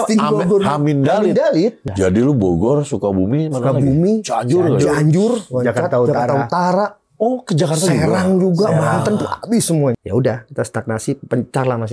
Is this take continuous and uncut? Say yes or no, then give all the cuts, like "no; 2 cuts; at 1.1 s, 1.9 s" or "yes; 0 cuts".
no; 2 cuts; at 1.8 s, 10.0 s